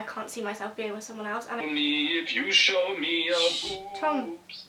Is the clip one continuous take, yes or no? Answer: no